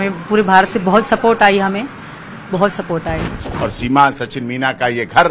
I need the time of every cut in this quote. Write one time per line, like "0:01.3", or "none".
0:03.4